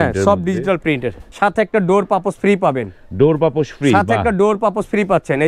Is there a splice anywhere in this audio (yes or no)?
yes